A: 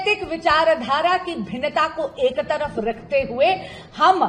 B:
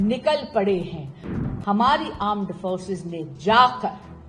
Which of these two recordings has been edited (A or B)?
B